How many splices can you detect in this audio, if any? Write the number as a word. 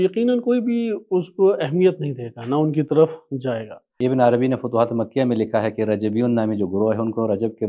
one